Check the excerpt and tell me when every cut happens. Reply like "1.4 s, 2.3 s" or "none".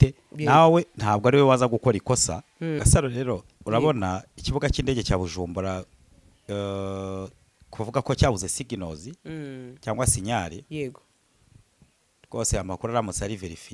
2.8 s